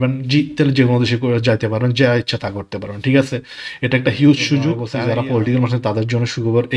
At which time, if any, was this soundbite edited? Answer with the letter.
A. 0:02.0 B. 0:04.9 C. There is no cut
B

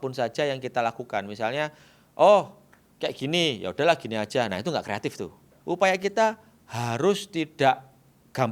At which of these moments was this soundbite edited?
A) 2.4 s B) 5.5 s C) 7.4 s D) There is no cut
B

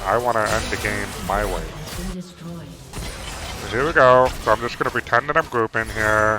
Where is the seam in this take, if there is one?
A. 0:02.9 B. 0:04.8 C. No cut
A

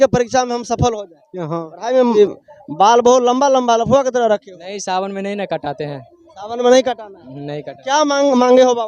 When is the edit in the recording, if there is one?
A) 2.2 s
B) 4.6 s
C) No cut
A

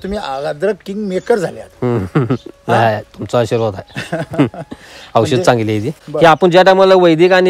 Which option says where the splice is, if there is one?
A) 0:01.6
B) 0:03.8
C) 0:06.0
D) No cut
C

